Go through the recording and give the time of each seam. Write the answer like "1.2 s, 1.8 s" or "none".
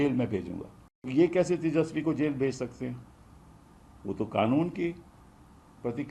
1.0 s

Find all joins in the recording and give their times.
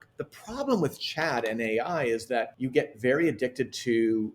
2.5 s

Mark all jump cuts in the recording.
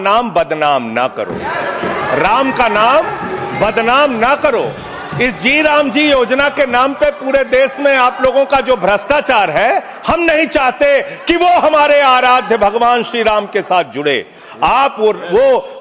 none

